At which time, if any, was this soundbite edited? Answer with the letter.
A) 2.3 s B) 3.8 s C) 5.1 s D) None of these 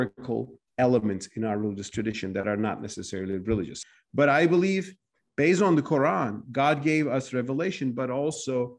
B